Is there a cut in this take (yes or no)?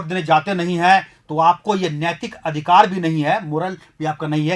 no